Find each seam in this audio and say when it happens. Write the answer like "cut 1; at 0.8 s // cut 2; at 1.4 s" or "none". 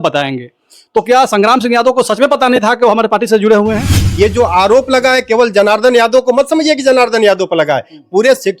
cut 1; at 4.0 s

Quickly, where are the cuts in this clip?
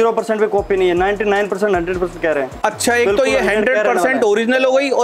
none

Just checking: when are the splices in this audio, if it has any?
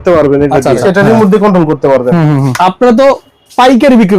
cut 1; at 0.8 s // cut 2; at 2.5 s

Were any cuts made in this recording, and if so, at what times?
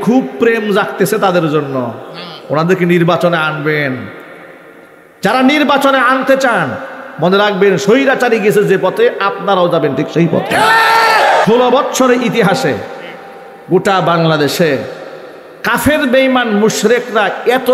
cut 1; at 11.4 s

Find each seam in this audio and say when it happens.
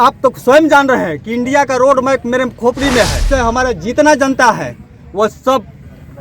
cut 1; at 3.2 s

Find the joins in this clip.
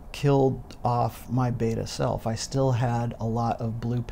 none

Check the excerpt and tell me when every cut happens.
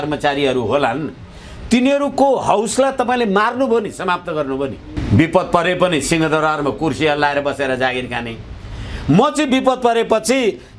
cut 1; at 4.9 s

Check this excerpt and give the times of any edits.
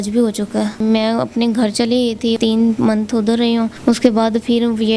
cut 1; at 0.8 s // cut 2; at 2.4 s // cut 3; at 3.7 s

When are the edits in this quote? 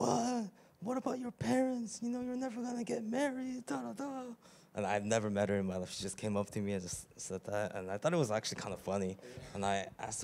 none

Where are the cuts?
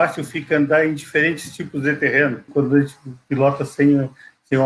cut 1; at 2.5 s

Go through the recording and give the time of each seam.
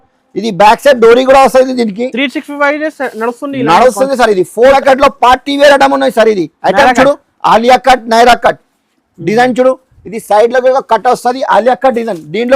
cut 1; at 4.7 s

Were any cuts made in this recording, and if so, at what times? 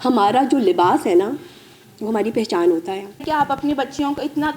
cut 1; at 3.2 s

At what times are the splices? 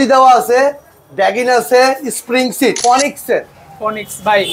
cut 1; at 2.8 s

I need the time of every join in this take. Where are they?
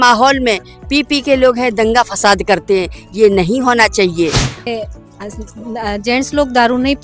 cut 1; at 4.7 s

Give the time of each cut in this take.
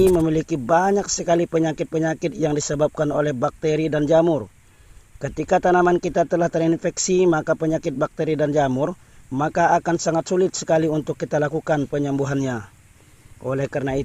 none

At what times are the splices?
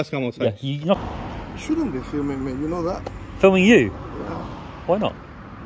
cut 1; at 1.0 s

